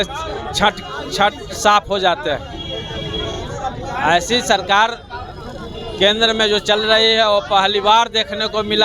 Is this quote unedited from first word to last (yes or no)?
yes